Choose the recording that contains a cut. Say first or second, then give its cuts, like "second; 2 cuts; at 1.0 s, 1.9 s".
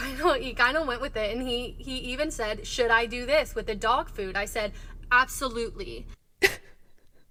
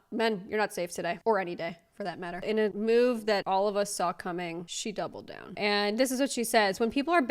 second; 3 cuts; at 2.4 s, 3.4 s, 5.5 s